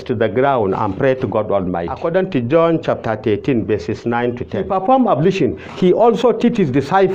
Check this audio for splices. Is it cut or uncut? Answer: cut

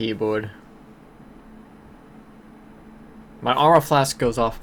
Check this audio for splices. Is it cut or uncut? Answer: uncut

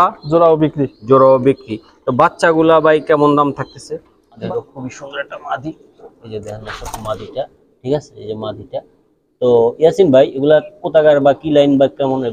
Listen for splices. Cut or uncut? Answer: cut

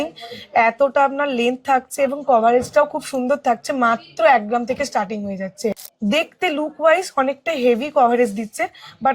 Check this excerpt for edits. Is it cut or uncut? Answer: cut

